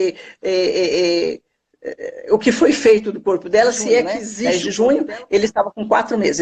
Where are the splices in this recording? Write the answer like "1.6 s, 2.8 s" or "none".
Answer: 4.3 s